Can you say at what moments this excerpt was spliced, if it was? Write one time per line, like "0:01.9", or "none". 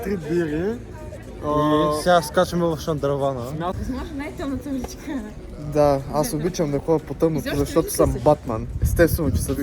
0:03.8